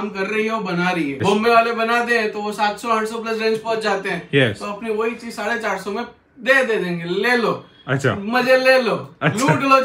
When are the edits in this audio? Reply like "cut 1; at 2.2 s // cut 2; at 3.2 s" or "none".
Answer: cut 1; at 1.2 s

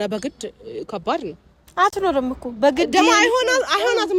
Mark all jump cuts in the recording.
none

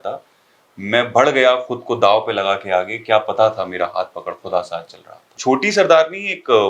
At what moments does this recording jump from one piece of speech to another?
cut 1; at 5.3 s

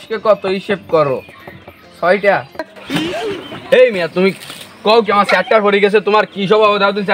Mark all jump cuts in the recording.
cut 1; at 2.7 s

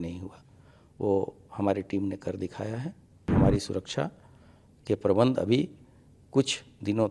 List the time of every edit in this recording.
cut 1; at 3.3 s

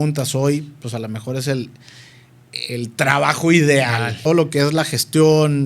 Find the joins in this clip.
cut 1; at 4.3 s

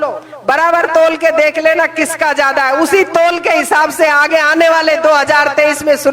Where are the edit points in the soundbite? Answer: none

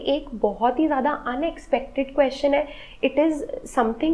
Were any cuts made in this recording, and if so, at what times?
none

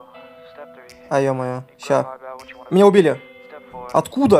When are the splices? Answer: cut 1; at 1.0 s

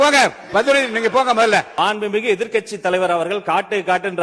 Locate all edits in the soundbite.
cut 1; at 1.7 s

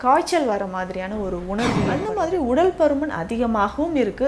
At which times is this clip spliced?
cut 1; at 2.0 s

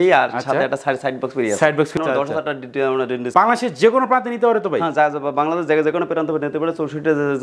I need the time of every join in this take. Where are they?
cut 1; at 2.0 s // cut 2; at 3.3 s

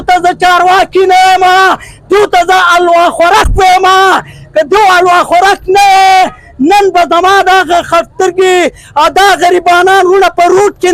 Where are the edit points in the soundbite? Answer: none

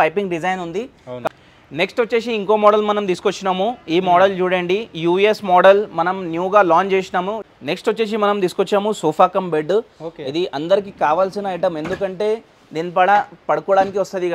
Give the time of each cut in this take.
cut 1; at 1.3 s // cut 2; at 7.4 s

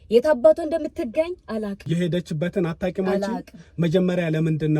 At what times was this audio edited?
cut 1; at 1.8 s

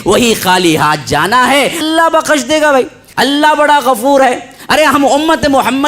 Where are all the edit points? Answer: cut 1; at 1.8 s // cut 2; at 3.0 s

